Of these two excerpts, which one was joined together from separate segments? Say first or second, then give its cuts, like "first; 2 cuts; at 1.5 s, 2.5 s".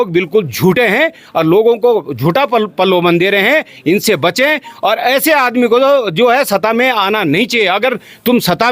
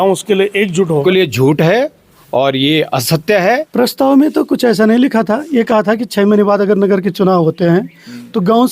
second; 2 cuts; at 1.0 s, 3.7 s